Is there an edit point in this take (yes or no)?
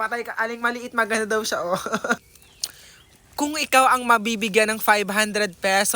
yes